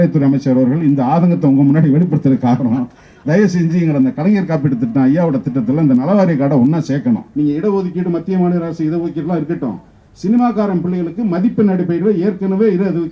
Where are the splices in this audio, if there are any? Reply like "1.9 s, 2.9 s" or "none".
7.3 s